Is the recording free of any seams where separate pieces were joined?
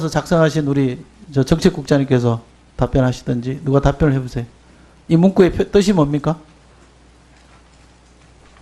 no; 1 cut; at 5.0 s

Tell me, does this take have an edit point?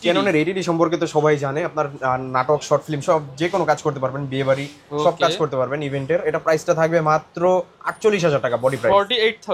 no; 0 cuts

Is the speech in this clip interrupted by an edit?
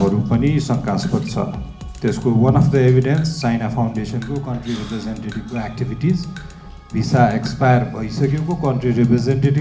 no; 0 cuts

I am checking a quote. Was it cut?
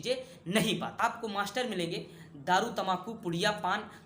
yes; 1 cut; at 1.0 s

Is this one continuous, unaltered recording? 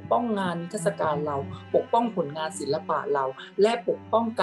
yes; 0 cuts

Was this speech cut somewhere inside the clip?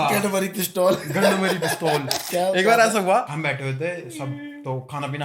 yes; 2 cuts; at 2.2 s, 3.3 s

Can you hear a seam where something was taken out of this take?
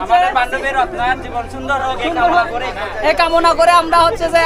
no; 0 cuts

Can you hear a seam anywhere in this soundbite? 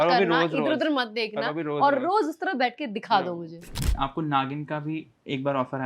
yes; 1 cut; at 3.8 s

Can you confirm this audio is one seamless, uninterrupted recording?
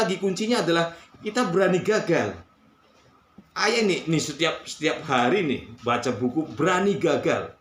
yes; 0 cuts

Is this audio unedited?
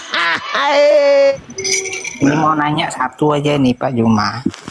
no; 1 cut; at 1.3 s

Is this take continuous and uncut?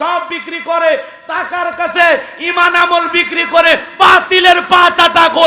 yes; 0 cuts

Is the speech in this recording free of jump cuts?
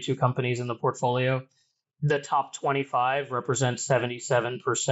yes; 0 cuts

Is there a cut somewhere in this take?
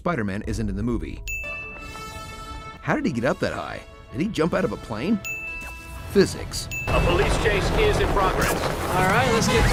no; 0 cuts

